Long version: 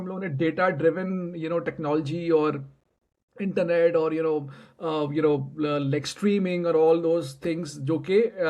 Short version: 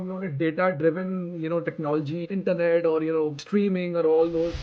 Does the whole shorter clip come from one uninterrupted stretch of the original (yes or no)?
no